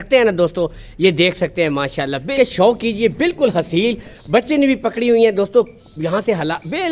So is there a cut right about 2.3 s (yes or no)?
yes